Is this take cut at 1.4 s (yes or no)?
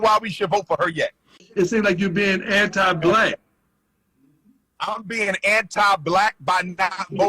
yes